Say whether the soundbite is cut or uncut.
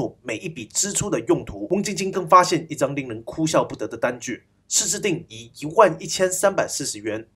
cut